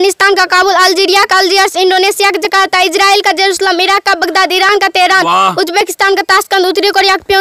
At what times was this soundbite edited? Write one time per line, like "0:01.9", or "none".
none